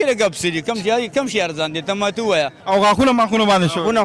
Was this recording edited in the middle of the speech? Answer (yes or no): yes